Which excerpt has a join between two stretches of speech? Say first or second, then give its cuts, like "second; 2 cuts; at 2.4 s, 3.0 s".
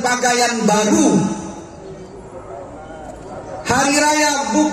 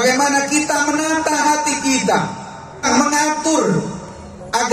second; 1 cut; at 2.9 s